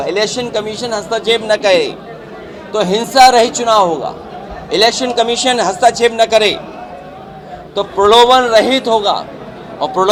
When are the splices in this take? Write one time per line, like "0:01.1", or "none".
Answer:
none